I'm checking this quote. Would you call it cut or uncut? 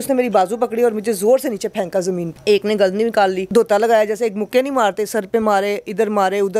cut